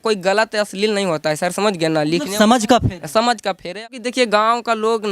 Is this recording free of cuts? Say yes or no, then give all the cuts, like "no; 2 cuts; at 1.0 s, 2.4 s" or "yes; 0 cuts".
no; 1 cut; at 3.8 s